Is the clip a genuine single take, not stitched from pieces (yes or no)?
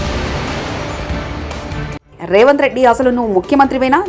yes